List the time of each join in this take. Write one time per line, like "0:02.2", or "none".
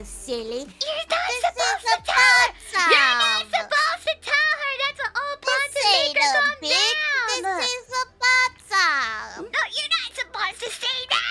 0:05.0